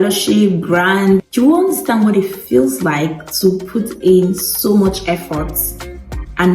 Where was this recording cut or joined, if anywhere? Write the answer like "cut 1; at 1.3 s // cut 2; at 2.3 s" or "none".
cut 1; at 1.3 s